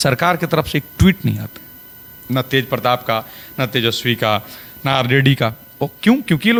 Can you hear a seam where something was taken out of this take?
no; 0 cuts

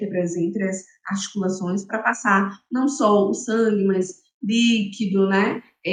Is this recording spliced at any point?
no; 0 cuts

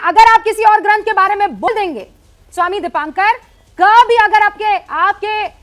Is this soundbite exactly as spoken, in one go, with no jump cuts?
no; 1 cut; at 1.7 s

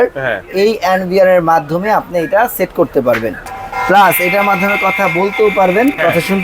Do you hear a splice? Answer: yes; 1 cut; at 3.4 s

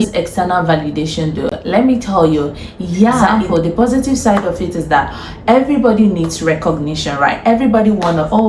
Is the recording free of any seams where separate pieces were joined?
no; 1 cut; at 3.1 s

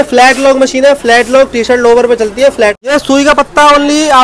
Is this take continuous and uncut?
no; 1 cut; at 2.8 s

